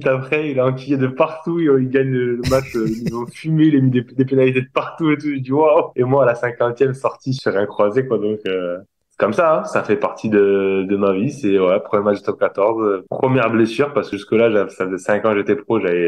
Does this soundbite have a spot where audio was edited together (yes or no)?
no